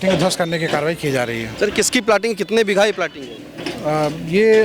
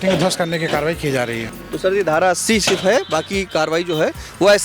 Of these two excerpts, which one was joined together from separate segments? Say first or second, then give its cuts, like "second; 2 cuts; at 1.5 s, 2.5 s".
second; 1 cut; at 1.5 s